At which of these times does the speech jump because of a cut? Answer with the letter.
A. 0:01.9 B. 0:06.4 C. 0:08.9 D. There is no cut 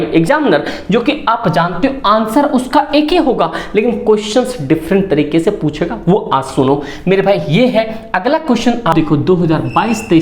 C